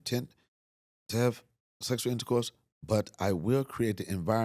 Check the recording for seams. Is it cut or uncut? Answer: uncut